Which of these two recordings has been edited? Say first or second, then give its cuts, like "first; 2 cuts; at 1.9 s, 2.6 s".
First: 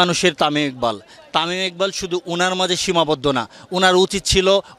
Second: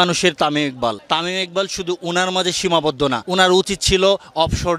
second; 2 cuts; at 1.0 s, 3.2 s